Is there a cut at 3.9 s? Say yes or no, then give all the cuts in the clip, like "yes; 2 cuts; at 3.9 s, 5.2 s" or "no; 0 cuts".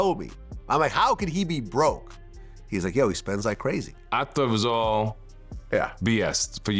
yes; 1 cut; at 3.9 s